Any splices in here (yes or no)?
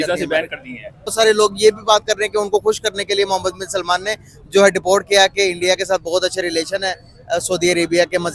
yes